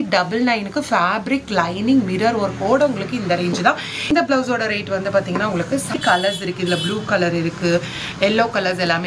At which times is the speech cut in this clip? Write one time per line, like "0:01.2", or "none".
0:04.1
0:06.0